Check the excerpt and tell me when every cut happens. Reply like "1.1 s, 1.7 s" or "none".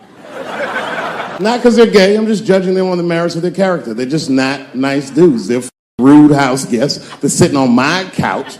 1.4 s